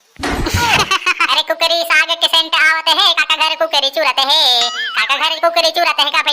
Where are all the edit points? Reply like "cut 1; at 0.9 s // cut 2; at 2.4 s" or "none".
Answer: cut 1; at 1.2 s